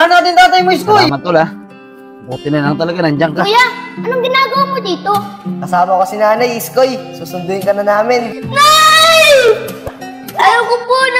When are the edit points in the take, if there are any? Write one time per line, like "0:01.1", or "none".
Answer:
0:01.1
0:03.4
0:08.4
0:10.4

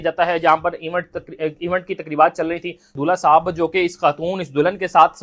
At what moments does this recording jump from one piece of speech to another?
0:02.9

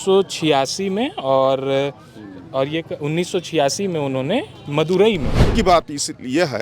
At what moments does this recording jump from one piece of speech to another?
0:05.5

